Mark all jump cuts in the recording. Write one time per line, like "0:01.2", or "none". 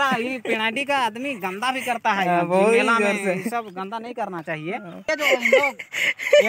0:02.9
0:05.1